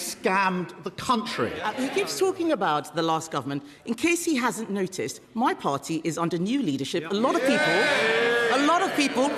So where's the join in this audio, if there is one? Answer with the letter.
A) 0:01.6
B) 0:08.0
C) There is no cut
A